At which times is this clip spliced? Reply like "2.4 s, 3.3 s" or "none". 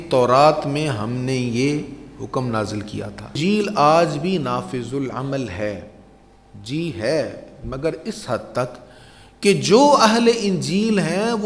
3.3 s